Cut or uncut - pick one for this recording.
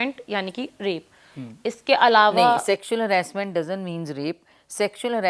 uncut